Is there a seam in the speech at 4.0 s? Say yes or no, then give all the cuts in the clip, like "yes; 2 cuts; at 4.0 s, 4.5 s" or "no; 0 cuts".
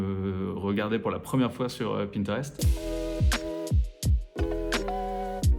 no; 1 cut; at 2.6 s